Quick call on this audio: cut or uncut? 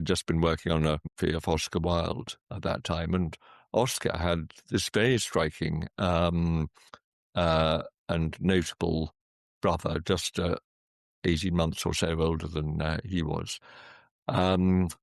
cut